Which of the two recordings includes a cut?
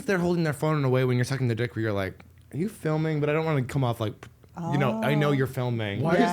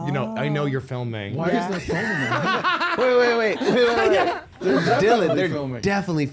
second; 1 cut; at 2.6 s

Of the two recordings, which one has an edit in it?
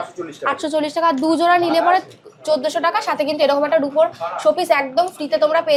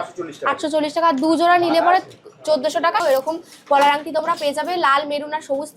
second; 1 cut; at 3.0 s

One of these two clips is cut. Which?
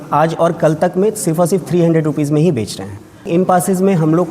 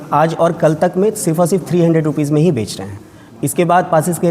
first; 1 cut; at 3.3 s

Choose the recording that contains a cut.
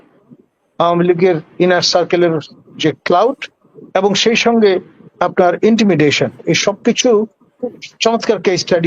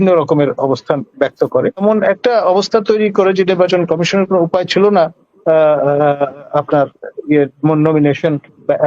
second; 1 cut; at 1.8 s

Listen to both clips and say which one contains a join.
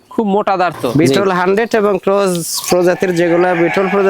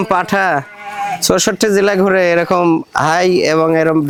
first; 1 cut; at 0.9 s

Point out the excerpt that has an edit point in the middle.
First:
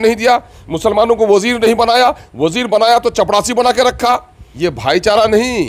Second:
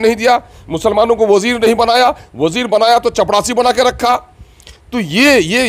first; 1 cut; at 4.4 s

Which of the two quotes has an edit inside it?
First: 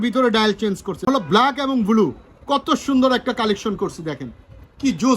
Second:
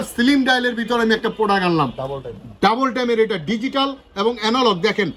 first; 1 cut; at 1.1 s

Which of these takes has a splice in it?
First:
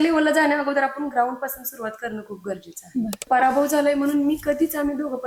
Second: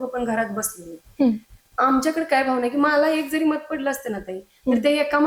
first; 1 cut; at 3.2 s

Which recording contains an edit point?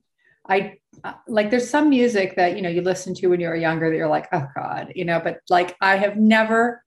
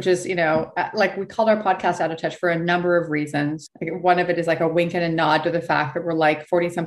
second; 1 cut; at 3.7 s

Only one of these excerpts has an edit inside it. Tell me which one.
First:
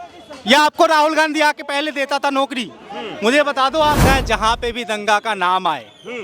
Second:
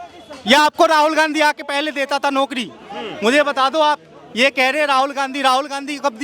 first; 1 cut; at 4.0 s

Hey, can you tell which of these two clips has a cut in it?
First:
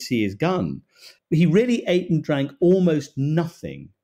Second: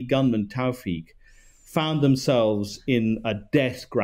first; 1 cut; at 1.1 s

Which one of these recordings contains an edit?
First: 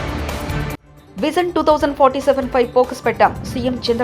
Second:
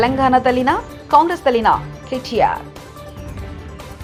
first; 1 cut; at 0.9 s

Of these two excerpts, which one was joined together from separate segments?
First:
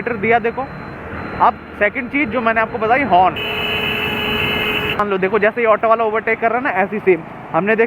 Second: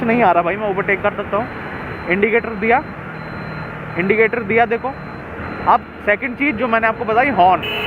first; 1 cut; at 5.0 s

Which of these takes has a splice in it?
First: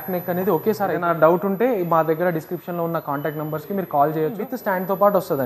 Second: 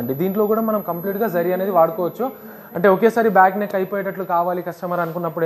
first; 2 cuts; at 1.0 s, 4.5 s

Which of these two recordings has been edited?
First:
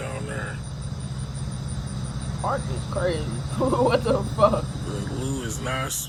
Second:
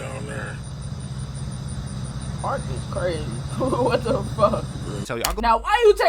second; 1 cut; at 5.0 s

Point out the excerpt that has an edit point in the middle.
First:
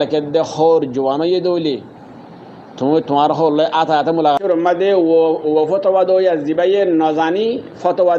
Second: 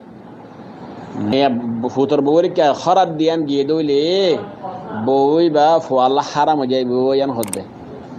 first; 1 cut; at 4.4 s

